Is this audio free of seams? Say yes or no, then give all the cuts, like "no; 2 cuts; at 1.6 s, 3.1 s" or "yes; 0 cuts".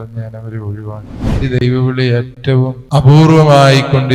no; 1 cut; at 1.4 s